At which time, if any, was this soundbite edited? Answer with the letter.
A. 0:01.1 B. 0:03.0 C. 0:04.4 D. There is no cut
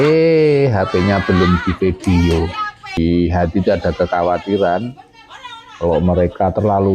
B